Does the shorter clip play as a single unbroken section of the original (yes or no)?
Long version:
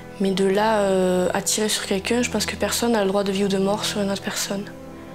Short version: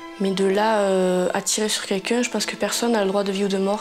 yes